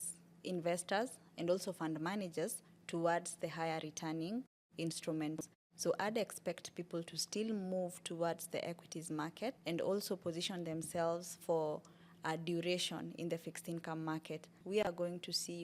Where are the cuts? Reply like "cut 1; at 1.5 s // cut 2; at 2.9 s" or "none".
cut 1; at 14.6 s